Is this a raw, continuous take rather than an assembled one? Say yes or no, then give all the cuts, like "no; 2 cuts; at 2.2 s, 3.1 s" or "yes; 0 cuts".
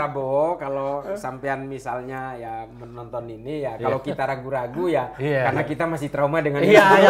yes; 0 cuts